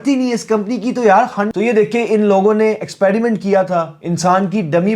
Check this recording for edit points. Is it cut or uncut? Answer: cut